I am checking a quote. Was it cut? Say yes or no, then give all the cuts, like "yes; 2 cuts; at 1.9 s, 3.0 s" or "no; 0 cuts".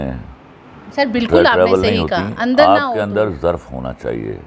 no; 0 cuts